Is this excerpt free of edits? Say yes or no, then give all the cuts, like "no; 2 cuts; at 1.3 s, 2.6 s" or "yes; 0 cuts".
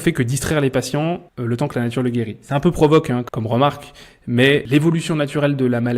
no; 3 cuts; at 1.3 s, 3.3 s, 4.6 s